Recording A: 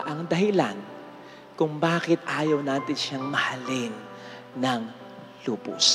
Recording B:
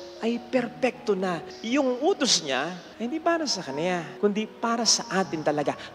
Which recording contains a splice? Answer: B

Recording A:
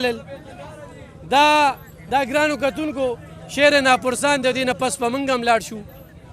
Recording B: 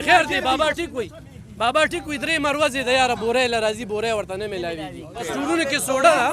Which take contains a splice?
B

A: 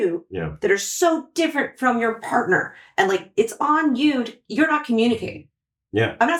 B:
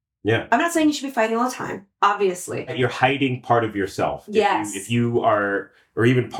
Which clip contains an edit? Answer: B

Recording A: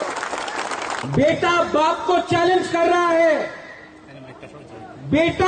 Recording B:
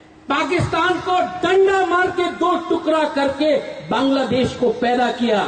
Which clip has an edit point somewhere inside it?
A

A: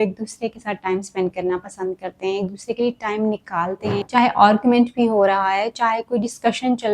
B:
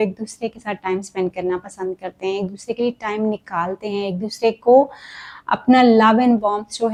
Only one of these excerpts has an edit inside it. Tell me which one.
A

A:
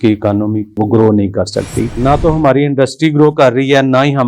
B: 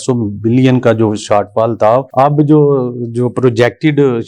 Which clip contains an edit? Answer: A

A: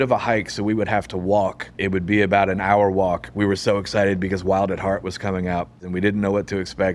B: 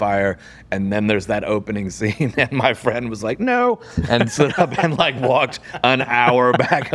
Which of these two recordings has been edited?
A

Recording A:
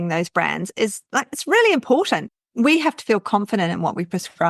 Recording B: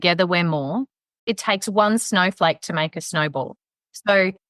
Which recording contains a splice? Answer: B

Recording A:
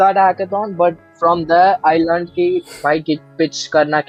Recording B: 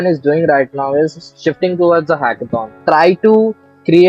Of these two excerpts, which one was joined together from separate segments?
B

